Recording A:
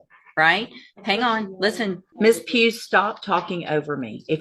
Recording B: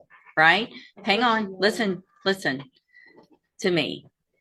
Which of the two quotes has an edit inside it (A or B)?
A